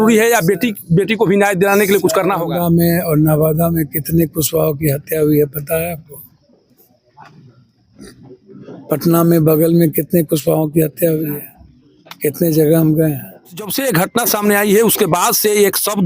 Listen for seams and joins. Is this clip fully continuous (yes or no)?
no